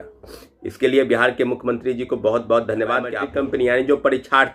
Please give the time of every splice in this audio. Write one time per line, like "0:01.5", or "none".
0:03.2